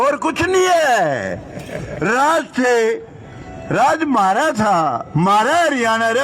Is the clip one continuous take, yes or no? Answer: yes